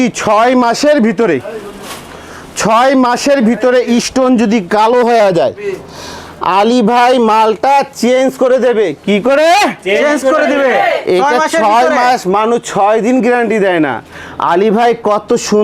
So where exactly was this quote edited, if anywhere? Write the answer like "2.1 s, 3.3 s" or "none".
none